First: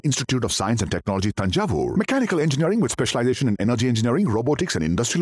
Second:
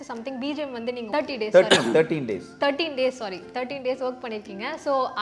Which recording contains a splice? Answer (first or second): second